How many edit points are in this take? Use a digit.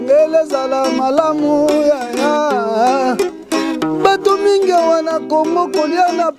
0